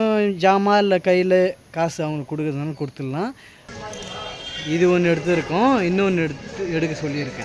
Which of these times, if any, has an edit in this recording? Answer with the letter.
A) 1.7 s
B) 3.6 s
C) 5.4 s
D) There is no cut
B